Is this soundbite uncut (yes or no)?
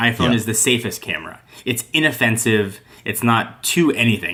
yes